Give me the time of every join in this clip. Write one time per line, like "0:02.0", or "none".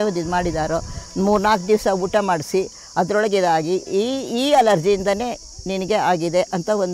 none